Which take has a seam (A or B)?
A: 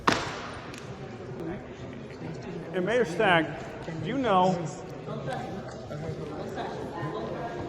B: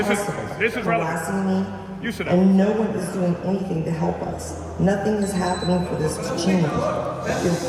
A